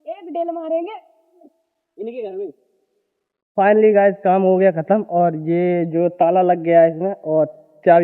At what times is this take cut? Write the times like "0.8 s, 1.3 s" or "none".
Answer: 3.4 s